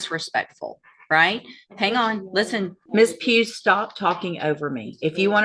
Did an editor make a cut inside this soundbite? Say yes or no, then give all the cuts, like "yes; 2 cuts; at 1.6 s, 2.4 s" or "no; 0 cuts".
yes; 1 cut; at 2.8 s